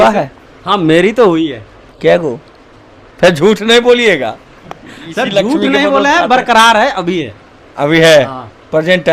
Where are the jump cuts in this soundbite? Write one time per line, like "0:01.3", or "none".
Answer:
none